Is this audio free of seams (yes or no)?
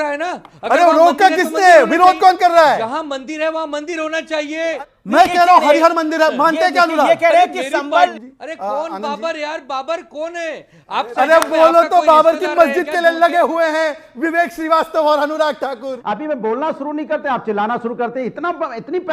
no